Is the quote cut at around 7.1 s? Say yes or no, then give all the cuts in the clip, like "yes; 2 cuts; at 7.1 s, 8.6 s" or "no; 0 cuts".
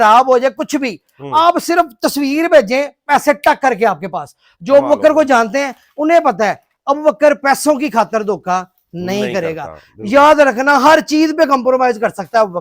no; 0 cuts